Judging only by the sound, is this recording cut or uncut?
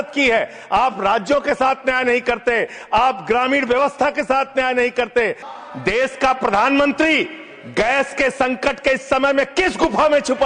cut